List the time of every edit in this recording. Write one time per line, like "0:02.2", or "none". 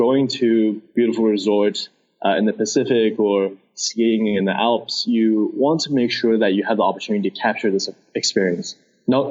0:00.9

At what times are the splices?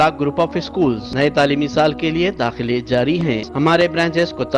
0:01.1
0:03.5

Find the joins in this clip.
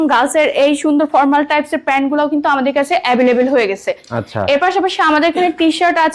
none

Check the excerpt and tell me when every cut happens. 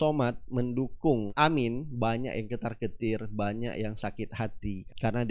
0:01.3

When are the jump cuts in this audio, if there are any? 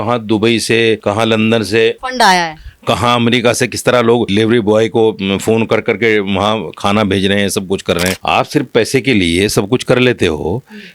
0:01.0
0:02.0
0:04.3
0:08.2

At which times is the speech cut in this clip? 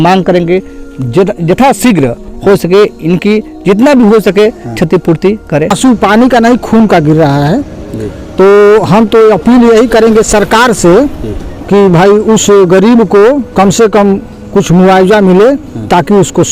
0:05.7

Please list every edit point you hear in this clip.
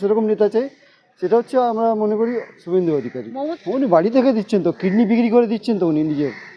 none

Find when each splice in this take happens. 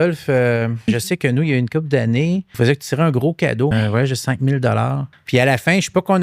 0:00.8
0:02.5
0:03.7
0:05.1

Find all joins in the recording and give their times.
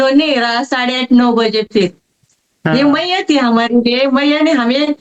0:02.3

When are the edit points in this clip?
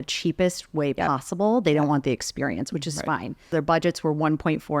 0:03.5

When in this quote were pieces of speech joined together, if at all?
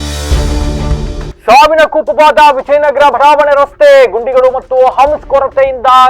0:01.0

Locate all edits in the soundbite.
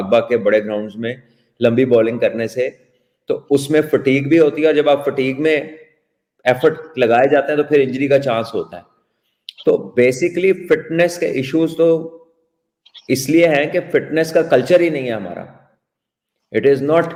none

